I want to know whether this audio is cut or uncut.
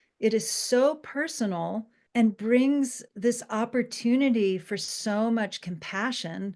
cut